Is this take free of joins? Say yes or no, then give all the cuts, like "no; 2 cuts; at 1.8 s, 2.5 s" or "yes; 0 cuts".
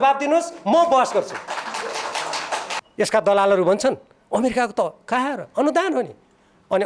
no; 1 cut; at 2.8 s